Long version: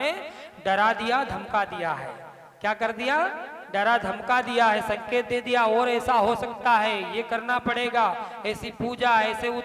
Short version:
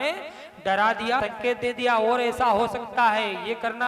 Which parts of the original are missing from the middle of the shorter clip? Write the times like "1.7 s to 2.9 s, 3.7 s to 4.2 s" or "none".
1.2 s to 4.9 s